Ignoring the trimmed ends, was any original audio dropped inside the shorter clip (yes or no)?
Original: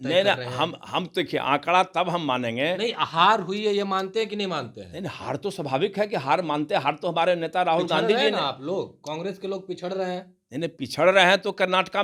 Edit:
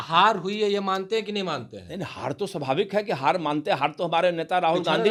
no